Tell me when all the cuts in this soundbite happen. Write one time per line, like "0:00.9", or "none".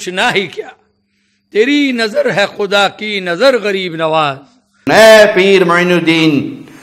0:04.8